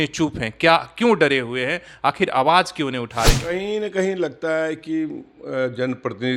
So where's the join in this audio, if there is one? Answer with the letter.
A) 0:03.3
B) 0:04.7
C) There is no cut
A